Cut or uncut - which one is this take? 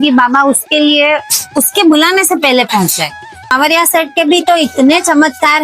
cut